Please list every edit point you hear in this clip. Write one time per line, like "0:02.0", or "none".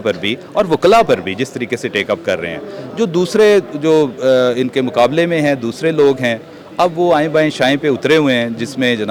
none